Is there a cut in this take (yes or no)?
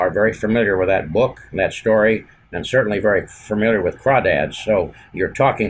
no